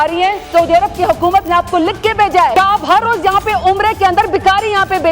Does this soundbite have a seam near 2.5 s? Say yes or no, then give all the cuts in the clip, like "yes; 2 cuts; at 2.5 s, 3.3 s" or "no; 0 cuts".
yes; 1 cut; at 2.5 s